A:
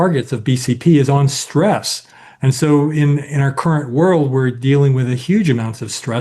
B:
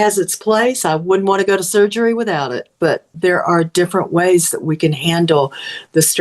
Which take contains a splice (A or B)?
B